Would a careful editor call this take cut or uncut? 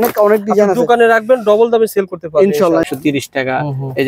cut